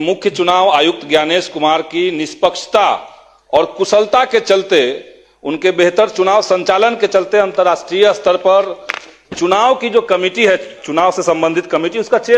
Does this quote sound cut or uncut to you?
uncut